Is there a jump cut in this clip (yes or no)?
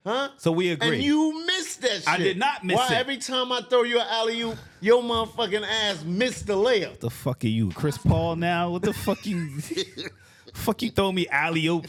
no